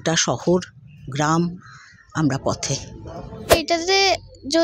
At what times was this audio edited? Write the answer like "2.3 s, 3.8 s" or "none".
3.5 s